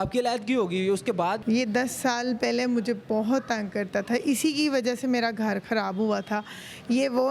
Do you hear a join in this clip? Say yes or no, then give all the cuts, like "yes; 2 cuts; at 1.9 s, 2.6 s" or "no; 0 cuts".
yes; 1 cut; at 1.4 s